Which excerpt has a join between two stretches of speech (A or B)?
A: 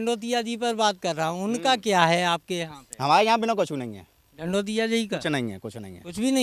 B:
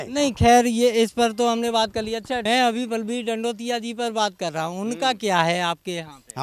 B